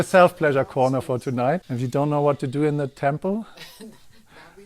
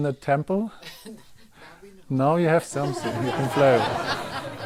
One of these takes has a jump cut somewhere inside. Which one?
first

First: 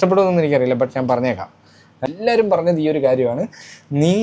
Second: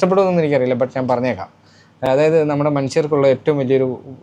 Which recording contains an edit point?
first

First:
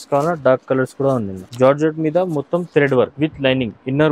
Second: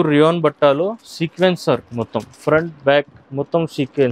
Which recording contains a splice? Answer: first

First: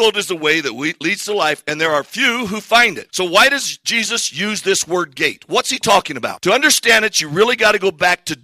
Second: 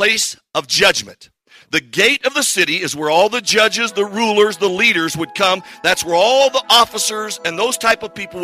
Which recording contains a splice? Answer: first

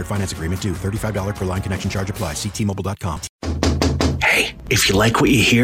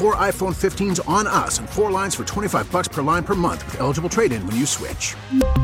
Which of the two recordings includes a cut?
first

